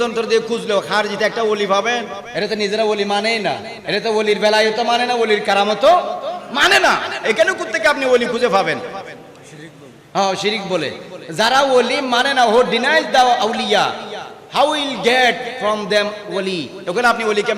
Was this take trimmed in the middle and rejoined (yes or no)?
yes